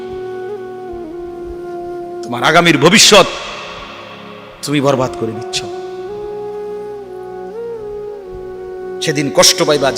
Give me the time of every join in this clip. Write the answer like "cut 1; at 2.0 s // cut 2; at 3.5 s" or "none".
cut 1; at 5.4 s // cut 2; at 9.0 s